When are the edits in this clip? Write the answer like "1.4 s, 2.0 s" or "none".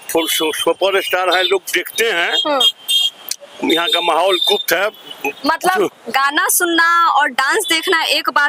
none